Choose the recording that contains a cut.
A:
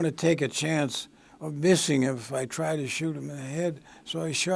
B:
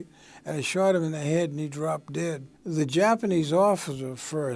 B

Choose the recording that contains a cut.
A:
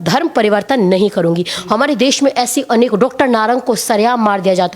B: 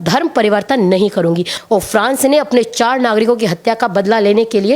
B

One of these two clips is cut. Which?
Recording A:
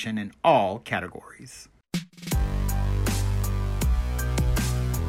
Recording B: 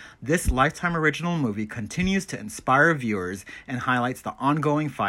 A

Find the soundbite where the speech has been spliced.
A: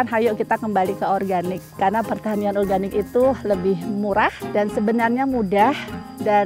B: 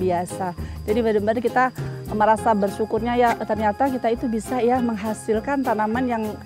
A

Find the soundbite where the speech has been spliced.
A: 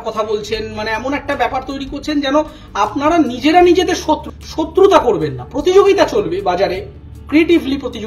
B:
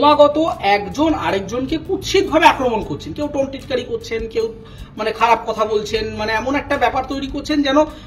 A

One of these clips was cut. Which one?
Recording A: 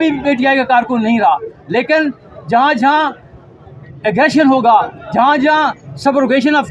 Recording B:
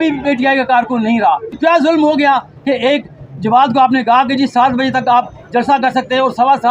B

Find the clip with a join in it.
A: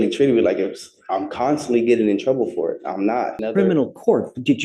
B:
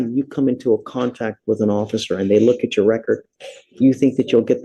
A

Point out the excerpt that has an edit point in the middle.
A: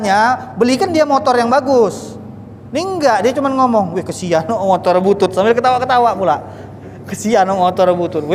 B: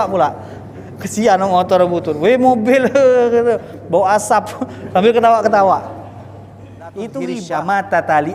B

